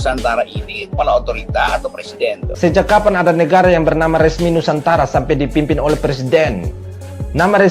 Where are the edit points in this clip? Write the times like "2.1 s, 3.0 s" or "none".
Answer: 2.5 s